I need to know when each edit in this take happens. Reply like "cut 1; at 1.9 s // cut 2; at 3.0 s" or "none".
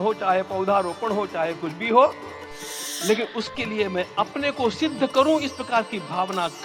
none